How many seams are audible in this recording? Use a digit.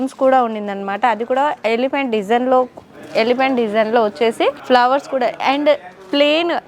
1